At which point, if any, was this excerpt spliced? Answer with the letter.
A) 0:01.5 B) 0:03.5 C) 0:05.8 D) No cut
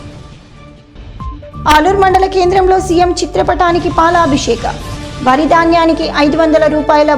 A